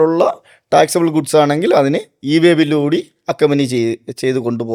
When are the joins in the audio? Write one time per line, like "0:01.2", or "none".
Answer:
none